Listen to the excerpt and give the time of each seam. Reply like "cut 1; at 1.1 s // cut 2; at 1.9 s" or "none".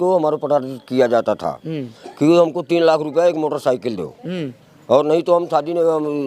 none